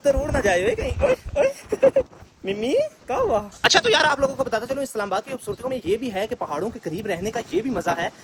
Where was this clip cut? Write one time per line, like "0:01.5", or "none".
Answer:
none